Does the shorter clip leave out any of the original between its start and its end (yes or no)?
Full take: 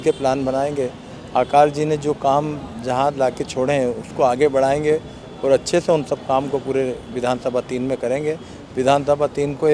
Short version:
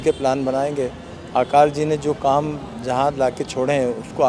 no